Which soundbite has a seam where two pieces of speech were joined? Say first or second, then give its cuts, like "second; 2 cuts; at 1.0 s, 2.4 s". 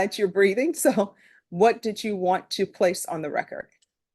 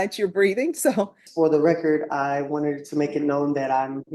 second; 1 cut; at 1.2 s